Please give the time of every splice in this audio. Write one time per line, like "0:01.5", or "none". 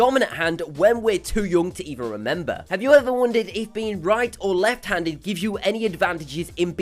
0:02.5